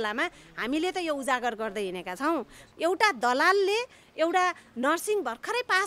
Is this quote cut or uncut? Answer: cut